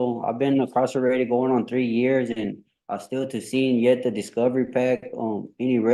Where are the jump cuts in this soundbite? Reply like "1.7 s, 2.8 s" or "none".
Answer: none

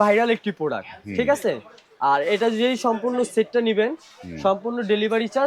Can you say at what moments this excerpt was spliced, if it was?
none

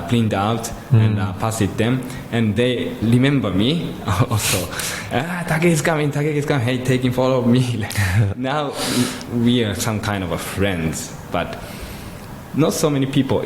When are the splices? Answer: 3.0 s

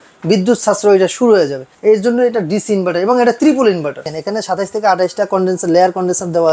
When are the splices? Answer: 1.7 s, 4.1 s

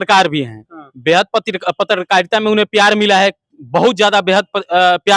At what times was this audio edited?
none

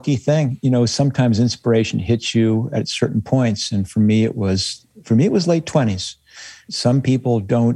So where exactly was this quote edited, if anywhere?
6.6 s

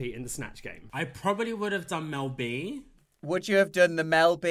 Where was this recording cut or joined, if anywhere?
1.0 s, 3.1 s

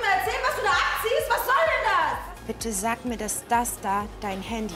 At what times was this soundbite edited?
2.2 s

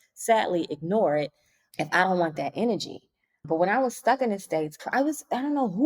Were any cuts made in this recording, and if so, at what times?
none

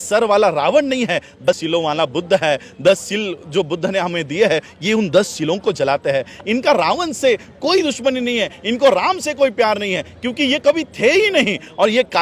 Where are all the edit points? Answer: 1.5 s

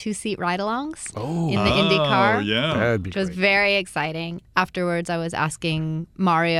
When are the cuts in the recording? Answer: 4.4 s

